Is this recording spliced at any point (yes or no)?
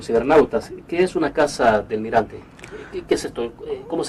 yes